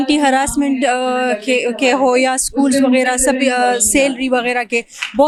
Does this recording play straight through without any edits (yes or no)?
yes